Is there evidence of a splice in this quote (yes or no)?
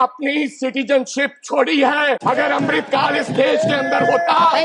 yes